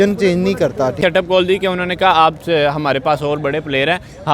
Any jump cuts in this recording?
yes; 1 cut; at 1.0 s

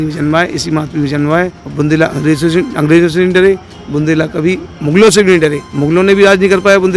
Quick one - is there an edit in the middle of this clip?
yes; 2 cuts; at 1.6 s, 5.7 s

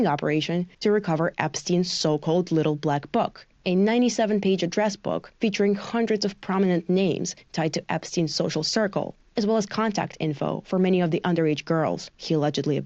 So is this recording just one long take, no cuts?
yes; 0 cuts

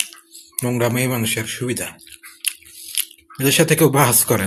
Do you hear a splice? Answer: no; 0 cuts

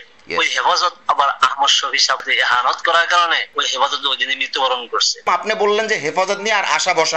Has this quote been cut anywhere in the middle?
yes; 2 cuts; at 2.2 s, 5.3 s

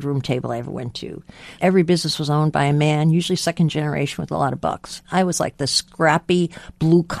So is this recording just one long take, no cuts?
no; 3 cuts; at 1.5 s, 5.0 s, 5.8 s

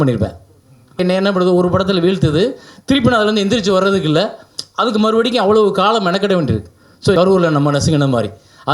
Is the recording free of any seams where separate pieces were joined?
no; 2 cuts; at 1.0 s, 7.1 s

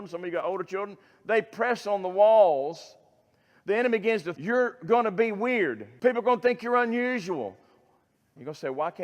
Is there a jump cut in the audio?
yes; 2 cuts; at 4.3 s, 5.8 s

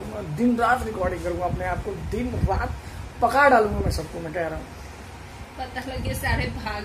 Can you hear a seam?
no; 0 cuts

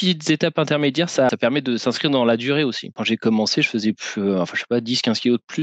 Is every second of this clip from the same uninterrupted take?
no; 2 cuts; at 1.3 s, 3.0 s

